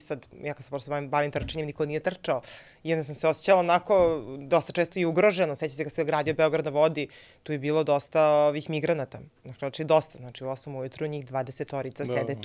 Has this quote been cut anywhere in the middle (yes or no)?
no